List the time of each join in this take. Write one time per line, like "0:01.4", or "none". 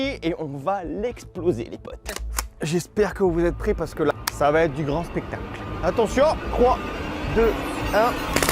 0:04.1